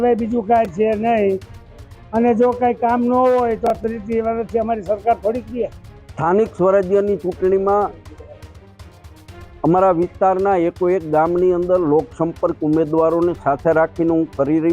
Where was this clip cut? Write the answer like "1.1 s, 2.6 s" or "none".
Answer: none